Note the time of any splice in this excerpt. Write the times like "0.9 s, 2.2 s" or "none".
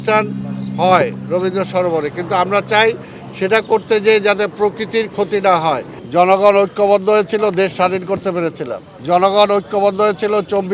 5.9 s, 8.9 s

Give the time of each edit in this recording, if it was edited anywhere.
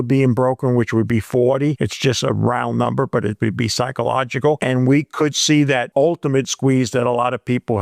none

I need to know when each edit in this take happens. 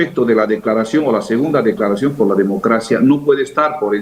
none

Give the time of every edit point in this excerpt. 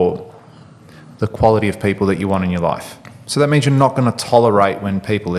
none

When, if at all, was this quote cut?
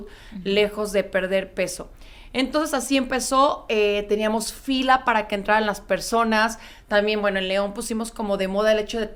none

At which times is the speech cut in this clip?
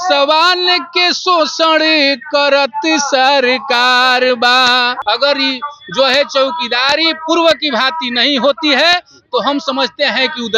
5.0 s

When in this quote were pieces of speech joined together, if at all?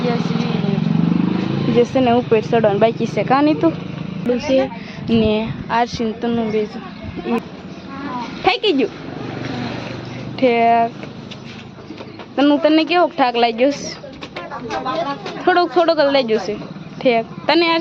4.3 s, 7.4 s

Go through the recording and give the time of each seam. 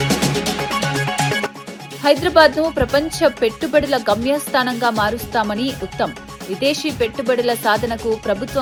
none

